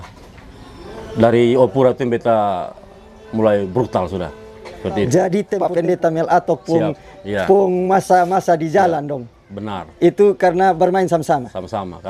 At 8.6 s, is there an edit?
no; 1 cut; at 5.5 s

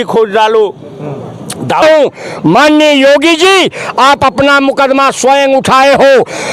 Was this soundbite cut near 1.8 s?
yes; 1 cut; at 1.8 s

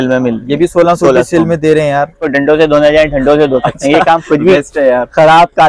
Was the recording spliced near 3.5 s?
no; 1 cut; at 2.2 s

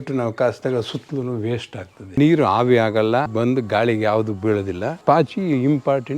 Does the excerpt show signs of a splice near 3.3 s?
yes; 3 cuts; at 2.2 s, 3.3 s, 5.0 s

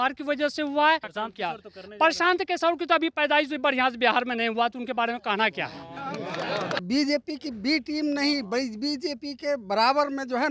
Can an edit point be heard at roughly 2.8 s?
no; 2 cuts; at 1.1 s, 6.8 s

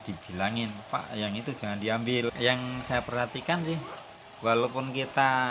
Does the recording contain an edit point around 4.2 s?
no; 1 cut; at 2.3 s

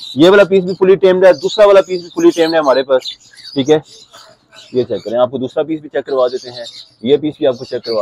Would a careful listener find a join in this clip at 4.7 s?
no; 0 cuts

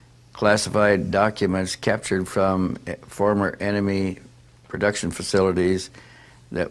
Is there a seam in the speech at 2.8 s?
yes; 1 cut; at 2.8 s

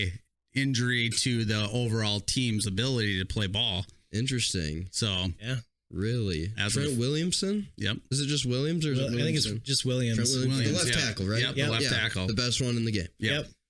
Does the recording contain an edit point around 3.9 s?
no; 0 cuts

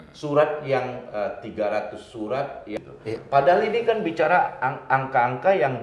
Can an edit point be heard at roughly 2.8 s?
yes; 1 cut; at 2.8 s

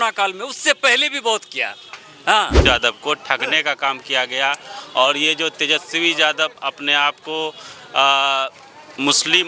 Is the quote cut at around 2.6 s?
yes; 1 cut; at 2.6 s

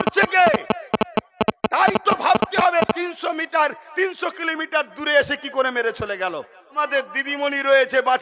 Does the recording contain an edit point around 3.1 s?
no; 1 cut; at 6.8 s

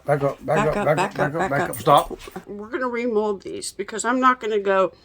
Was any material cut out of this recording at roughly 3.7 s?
no; 1 cut; at 2.5 s

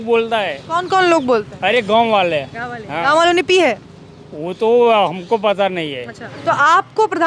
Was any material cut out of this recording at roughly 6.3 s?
yes; 1 cut; at 6.3 s

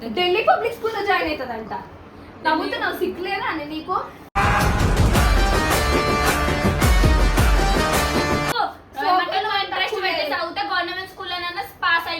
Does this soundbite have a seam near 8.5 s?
yes; 1 cut; at 8.5 s

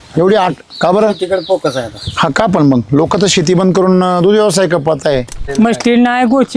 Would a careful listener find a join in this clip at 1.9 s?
no; 1 cut; at 5.4 s

